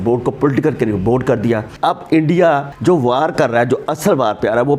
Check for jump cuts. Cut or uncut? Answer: cut